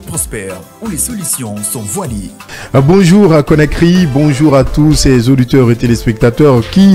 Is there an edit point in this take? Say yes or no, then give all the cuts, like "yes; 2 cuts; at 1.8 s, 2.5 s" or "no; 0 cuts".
no; 0 cuts